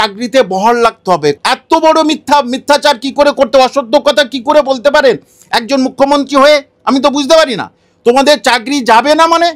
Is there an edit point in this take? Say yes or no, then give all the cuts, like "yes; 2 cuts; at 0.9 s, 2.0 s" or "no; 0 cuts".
yes; 1 cut; at 1.4 s